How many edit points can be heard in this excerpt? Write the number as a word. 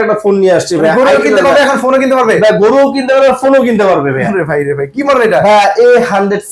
zero